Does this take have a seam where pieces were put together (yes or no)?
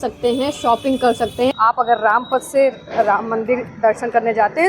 yes